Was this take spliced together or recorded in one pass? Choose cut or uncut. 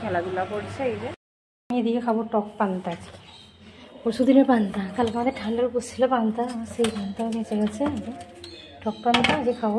cut